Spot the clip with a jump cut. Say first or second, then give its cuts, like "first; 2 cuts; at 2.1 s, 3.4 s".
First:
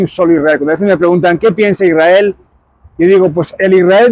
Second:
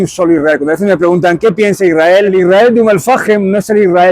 second; 1 cut; at 2.3 s